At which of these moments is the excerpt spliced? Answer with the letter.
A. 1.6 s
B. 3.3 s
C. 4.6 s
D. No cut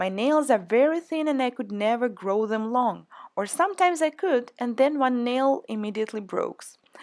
D